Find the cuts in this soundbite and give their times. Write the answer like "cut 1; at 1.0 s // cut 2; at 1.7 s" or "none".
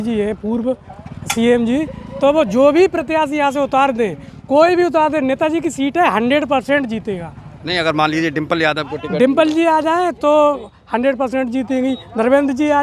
none